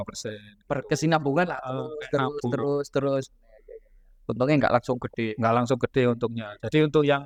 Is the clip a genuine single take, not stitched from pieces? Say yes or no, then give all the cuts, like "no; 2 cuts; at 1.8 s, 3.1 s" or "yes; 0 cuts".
yes; 0 cuts